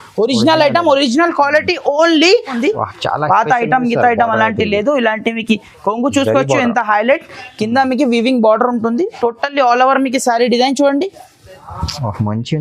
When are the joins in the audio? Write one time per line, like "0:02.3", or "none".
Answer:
0:02.5